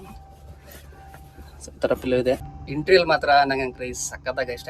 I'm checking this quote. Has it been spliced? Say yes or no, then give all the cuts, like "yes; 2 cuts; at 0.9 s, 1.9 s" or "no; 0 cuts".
yes; 1 cut; at 2.6 s